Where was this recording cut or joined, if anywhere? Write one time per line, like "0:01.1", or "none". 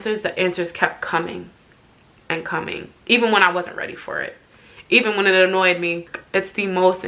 0:06.1